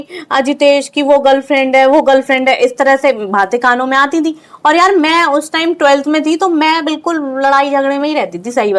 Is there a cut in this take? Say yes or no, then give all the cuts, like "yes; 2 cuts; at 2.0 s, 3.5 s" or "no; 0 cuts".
no; 0 cuts